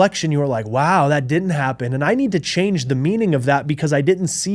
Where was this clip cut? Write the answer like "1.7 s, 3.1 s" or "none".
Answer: none